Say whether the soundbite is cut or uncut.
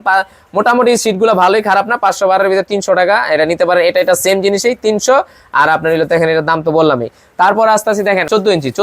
uncut